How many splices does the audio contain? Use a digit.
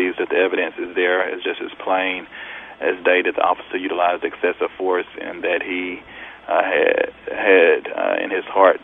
0